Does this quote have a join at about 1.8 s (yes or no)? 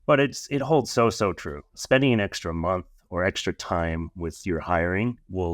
yes